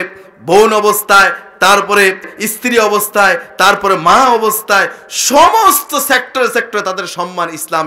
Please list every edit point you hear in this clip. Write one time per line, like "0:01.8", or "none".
0:02.4